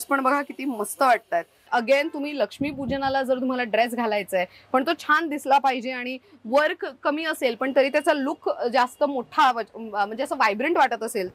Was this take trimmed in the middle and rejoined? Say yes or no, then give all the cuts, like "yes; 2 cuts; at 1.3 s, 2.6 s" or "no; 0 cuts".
yes; 1 cut; at 1.6 s